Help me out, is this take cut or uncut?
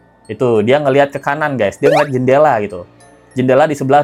uncut